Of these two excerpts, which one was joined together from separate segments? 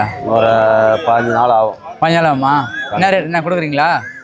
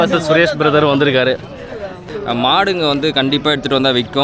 second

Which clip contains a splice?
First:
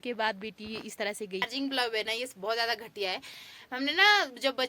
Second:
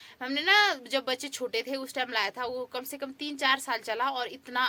first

